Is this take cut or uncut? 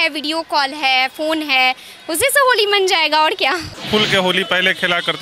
cut